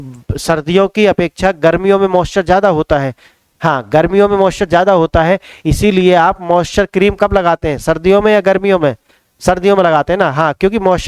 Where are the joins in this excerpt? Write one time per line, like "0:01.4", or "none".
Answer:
none